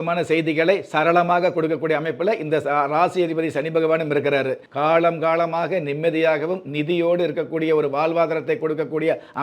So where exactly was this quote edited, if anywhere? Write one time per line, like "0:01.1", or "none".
0:04.6